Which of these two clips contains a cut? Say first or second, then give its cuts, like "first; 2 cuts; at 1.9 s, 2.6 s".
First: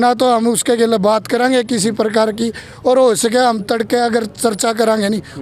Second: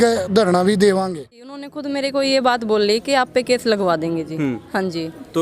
second; 1 cut; at 1.7 s